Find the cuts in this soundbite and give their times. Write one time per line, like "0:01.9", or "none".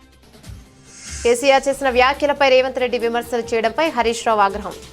none